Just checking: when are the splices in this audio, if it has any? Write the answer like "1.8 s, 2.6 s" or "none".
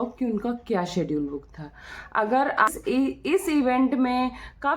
2.7 s